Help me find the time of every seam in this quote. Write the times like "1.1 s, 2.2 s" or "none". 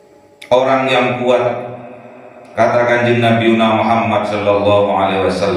none